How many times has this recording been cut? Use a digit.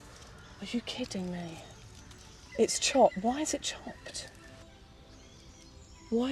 2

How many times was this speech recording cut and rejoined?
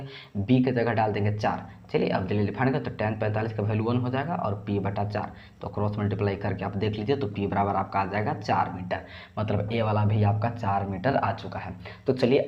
0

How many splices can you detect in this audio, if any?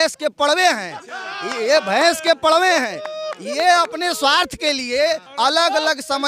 1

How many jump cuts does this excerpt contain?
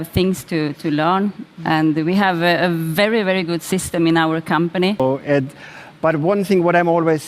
1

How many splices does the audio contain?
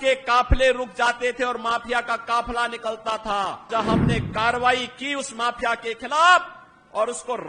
1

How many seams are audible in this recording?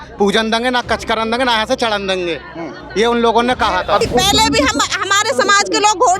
1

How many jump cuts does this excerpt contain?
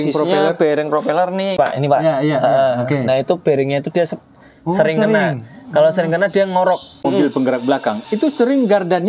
2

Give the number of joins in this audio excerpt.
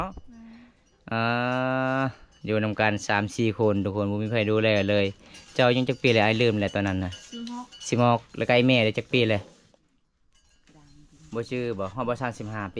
0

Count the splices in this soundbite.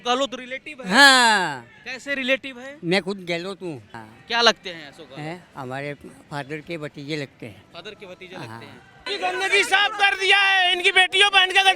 2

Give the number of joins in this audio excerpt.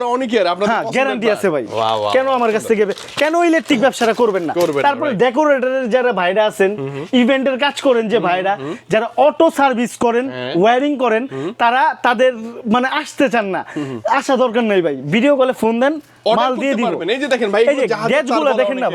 0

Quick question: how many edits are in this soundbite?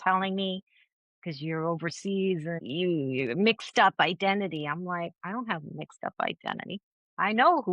1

